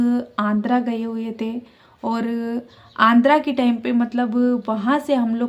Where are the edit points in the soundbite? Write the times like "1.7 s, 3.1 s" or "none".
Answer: none